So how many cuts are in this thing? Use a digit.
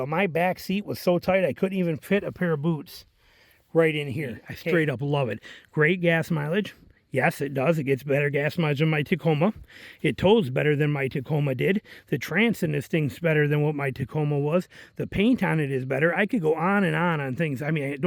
1